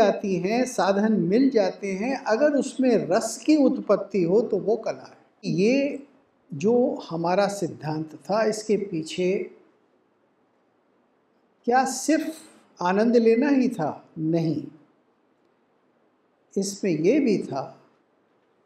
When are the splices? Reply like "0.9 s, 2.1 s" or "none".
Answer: 5.4 s